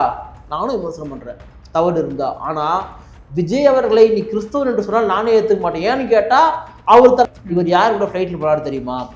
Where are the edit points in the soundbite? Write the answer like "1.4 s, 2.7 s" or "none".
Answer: 7.3 s

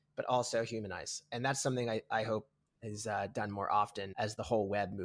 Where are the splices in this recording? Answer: 4.0 s

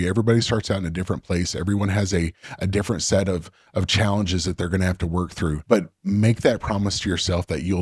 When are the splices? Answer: 5.6 s

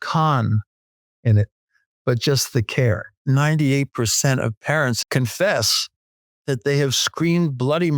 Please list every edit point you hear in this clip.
3.2 s, 5.0 s

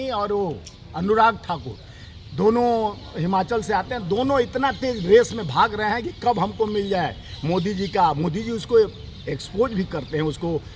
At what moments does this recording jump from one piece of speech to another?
none

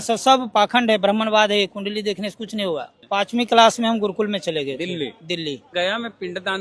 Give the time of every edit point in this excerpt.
2.9 s, 5.7 s

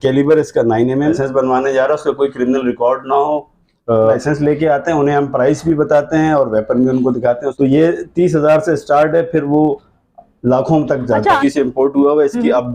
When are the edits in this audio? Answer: 1.1 s, 4.1 s, 7.5 s, 11.4 s

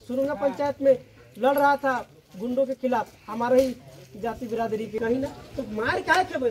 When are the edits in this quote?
5.0 s

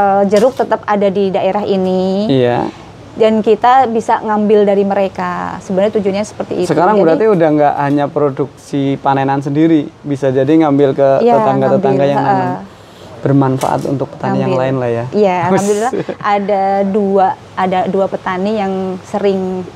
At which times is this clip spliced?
none

